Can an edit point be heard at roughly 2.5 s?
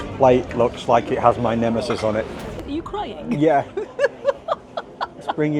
yes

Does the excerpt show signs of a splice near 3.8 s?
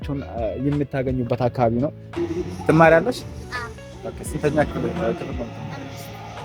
no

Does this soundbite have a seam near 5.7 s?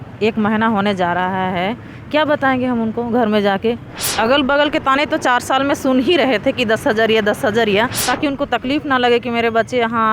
no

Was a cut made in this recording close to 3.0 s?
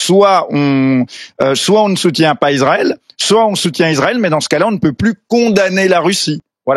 no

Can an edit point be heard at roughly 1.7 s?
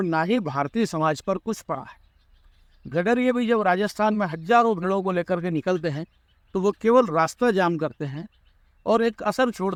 no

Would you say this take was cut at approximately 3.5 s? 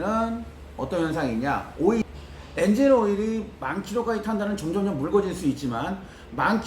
no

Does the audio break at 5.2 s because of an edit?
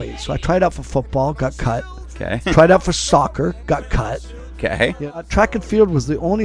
yes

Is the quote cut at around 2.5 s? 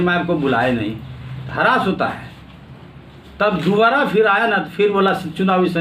no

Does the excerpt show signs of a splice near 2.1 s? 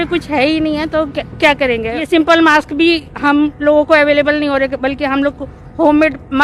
yes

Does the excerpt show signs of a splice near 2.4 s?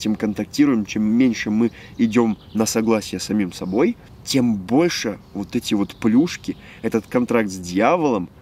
no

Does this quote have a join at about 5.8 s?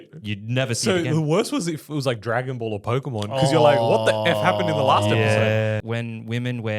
yes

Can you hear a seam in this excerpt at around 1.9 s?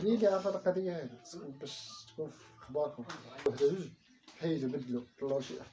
no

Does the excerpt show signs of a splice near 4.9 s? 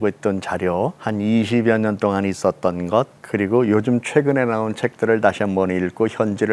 no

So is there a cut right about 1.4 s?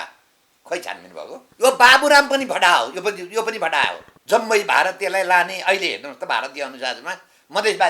yes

